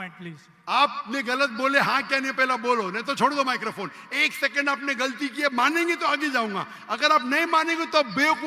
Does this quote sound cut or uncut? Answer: uncut